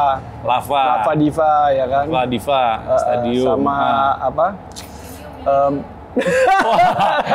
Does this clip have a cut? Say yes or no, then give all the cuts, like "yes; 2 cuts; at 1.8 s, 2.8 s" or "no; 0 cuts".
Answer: no; 0 cuts